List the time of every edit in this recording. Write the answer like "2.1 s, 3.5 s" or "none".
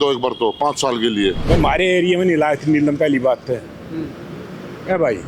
1.4 s